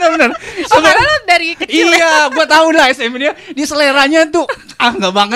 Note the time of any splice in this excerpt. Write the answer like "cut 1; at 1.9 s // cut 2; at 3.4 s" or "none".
none